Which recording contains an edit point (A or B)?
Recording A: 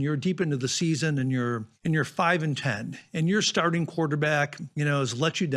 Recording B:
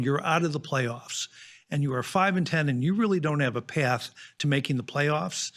A